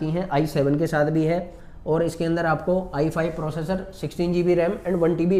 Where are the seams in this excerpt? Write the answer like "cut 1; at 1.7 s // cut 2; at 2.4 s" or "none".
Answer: none